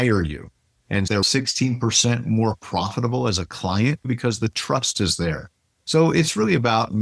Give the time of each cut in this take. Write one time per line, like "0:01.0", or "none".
0:01.2
0:04.0